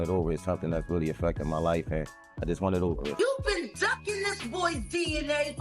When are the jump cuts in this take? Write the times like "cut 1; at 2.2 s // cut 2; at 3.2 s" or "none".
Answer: cut 1; at 3.1 s